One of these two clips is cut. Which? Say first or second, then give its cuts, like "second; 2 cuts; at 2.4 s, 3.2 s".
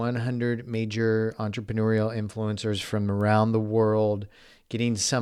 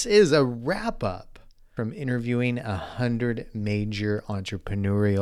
second; 1 cut; at 1.8 s